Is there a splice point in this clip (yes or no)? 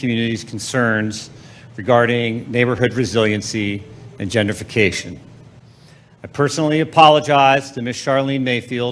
no